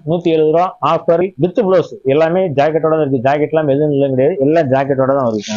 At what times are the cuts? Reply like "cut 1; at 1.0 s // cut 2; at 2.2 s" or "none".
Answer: cut 1; at 1.2 s